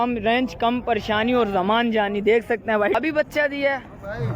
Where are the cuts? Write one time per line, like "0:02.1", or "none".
0:03.0